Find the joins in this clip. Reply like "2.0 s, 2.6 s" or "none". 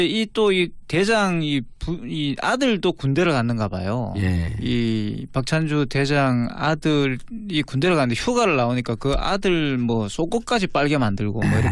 2.1 s